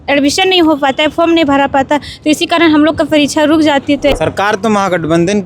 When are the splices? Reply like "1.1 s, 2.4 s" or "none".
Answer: 4.1 s